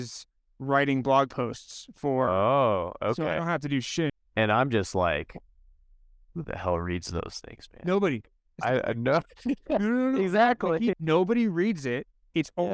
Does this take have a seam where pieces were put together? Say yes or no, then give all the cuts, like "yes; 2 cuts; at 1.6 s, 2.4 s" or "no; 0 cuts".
yes; 2 cuts; at 4.1 s, 11.0 s